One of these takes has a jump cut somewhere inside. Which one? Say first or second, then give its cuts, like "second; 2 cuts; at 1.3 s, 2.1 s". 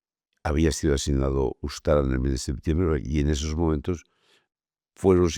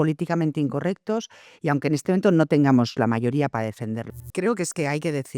second; 1 cut; at 4.2 s